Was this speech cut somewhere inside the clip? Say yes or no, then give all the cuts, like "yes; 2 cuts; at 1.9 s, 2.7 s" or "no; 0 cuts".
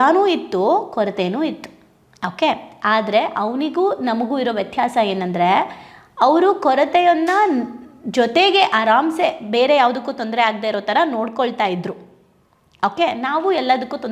no; 0 cuts